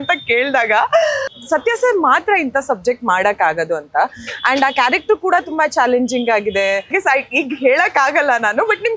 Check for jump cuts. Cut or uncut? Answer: cut